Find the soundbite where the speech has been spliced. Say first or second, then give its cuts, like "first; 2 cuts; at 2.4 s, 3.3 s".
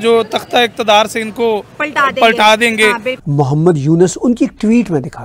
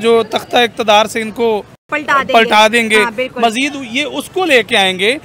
first; 2 cuts; at 1.8 s, 3.1 s